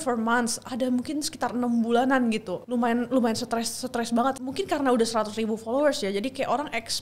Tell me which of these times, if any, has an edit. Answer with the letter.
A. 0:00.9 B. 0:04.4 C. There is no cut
B